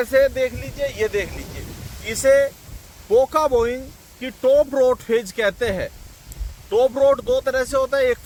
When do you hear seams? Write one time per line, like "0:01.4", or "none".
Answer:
none